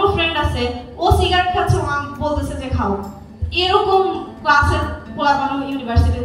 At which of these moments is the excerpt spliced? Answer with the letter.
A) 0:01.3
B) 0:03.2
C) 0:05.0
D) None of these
D